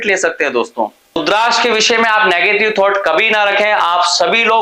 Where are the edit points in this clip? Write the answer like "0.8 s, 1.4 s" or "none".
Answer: 1.2 s